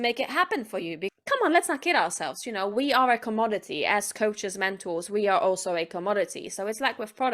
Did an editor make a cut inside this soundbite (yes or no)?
yes